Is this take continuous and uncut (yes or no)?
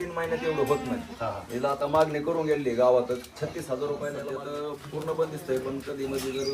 no